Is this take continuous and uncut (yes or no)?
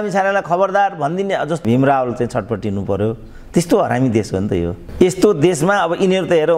no